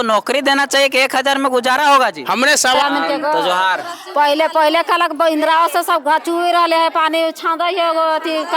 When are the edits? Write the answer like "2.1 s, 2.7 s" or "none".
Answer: 2.8 s

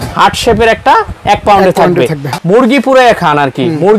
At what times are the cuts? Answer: 2.3 s

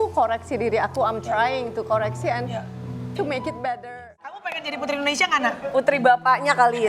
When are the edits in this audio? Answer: 4.4 s

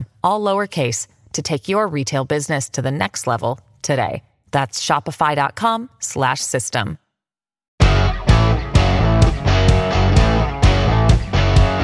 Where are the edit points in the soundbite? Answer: 7.7 s

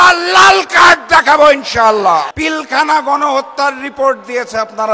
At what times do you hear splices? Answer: 2.3 s

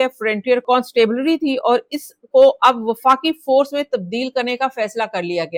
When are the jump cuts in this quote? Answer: none

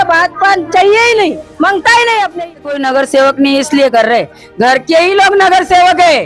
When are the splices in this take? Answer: 2.4 s

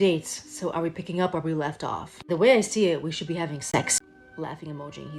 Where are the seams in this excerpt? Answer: 3.9 s

